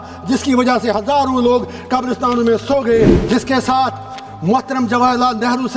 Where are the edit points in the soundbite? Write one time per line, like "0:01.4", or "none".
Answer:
0:03.2